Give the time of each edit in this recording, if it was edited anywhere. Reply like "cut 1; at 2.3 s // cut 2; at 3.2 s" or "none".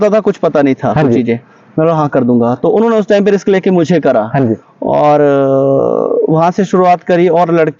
none